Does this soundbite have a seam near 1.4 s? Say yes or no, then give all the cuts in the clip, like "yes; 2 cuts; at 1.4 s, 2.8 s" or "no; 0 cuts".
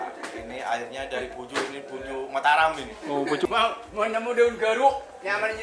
no; 1 cut; at 3.4 s